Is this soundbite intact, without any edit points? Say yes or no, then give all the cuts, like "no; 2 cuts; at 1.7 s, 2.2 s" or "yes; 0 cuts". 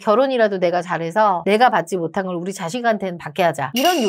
yes; 0 cuts